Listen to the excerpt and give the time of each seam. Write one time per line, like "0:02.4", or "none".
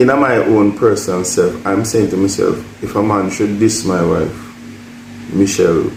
none